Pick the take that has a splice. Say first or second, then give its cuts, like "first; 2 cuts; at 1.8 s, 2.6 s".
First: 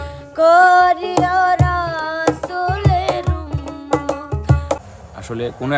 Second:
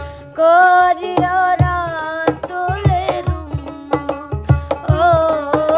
first; 1 cut; at 4.8 s